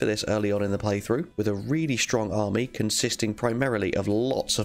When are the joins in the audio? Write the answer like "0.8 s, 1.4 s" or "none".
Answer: none